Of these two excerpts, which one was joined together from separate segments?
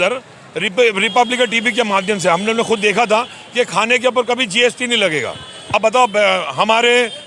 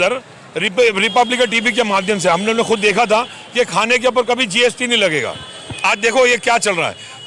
first; 1 cut; at 5.7 s

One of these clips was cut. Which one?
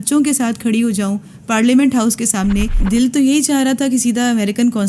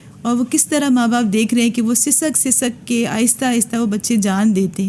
first; 1 cut; at 2.8 s

